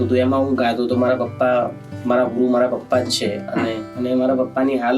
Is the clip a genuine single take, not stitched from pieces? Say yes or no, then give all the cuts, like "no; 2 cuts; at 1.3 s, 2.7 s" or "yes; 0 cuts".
no; 1 cut; at 3.9 s